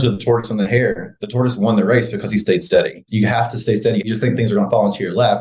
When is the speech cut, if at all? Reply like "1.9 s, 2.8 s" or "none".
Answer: 3.1 s, 4.0 s